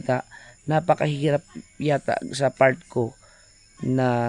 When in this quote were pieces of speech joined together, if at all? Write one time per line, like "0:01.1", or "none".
none